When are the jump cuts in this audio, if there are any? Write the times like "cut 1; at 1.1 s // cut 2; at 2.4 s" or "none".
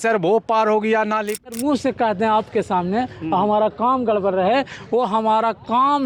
cut 1; at 1.4 s